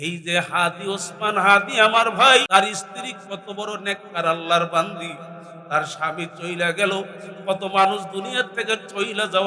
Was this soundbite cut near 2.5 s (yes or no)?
yes